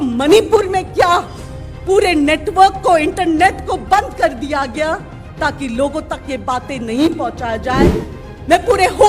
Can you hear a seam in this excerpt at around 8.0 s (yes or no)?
yes